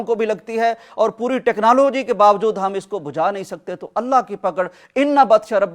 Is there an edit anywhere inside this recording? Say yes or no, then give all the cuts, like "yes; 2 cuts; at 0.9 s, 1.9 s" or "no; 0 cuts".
no; 0 cuts